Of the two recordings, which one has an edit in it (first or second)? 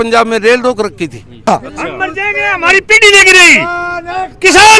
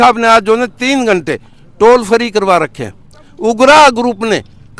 first